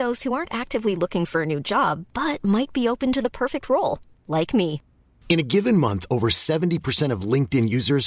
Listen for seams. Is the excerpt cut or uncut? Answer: uncut